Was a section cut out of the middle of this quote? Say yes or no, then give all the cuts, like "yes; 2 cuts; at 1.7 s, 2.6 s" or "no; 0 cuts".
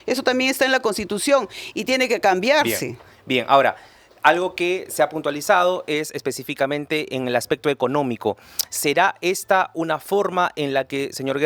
no; 0 cuts